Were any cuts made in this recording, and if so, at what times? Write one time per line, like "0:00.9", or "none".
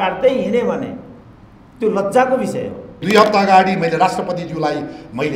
0:02.9